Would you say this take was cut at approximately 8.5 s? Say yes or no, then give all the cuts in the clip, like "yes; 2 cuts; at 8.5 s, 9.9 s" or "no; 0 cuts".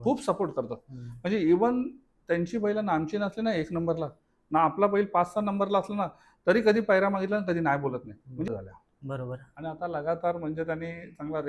yes; 1 cut; at 8.5 s